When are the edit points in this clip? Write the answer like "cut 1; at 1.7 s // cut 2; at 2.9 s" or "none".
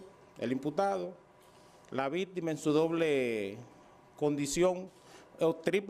cut 1; at 4.4 s